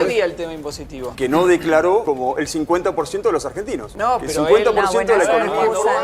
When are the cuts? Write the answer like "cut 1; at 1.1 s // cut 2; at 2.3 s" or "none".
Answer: cut 1; at 1.1 s // cut 2; at 2.0 s // cut 3; at 3.8 s